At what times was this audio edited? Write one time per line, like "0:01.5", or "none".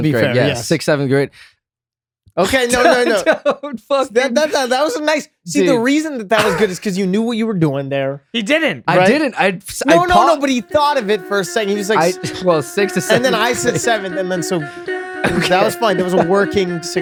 none

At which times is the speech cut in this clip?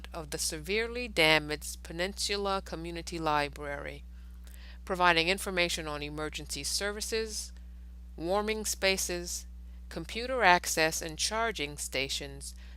none

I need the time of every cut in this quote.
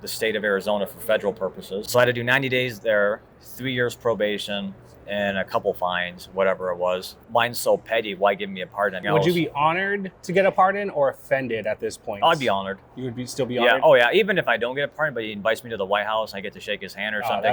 0:01.8
0:07.1
0:09.1

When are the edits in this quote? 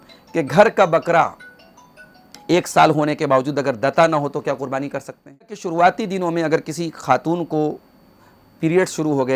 0:05.6

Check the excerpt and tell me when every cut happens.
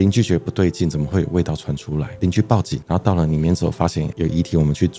0:02.1
0:04.1

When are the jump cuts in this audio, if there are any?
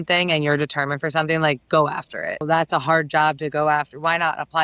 0:02.4

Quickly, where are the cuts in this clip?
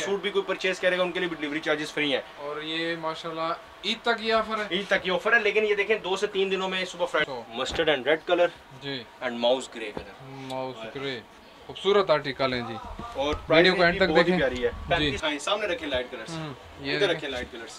0:07.2
0:15.2

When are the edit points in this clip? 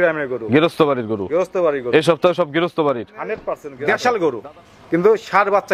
0:03.7

